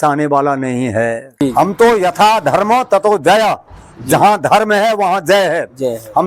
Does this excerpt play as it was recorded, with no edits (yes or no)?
no